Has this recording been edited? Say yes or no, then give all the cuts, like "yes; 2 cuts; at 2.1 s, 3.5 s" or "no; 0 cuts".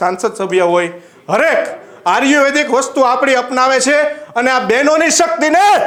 no; 0 cuts